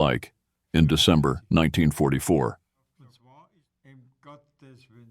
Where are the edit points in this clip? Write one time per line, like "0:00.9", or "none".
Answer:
0:03.2

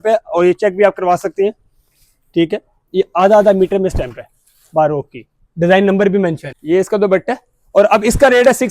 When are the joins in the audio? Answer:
0:06.5

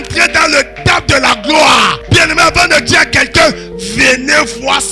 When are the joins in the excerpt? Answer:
0:02.0

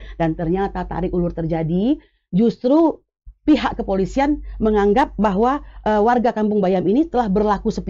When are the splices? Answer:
none

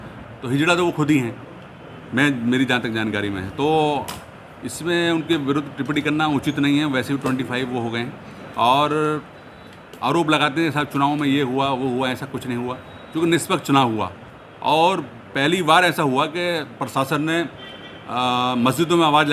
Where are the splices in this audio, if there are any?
none

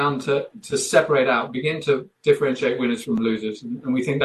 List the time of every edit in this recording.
none

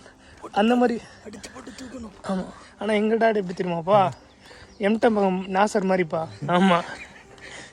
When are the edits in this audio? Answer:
0:02.6
0:06.3

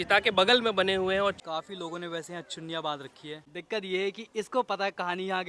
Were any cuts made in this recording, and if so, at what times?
0:01.4
0:03.5

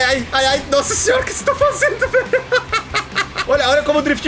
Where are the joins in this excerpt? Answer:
0:03.3

